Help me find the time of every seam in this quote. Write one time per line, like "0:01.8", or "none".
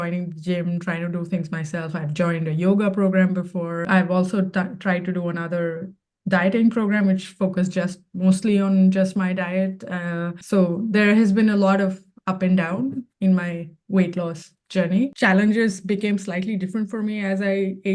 0:10.4
0:15.1